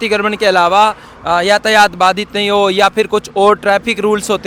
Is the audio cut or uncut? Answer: uncut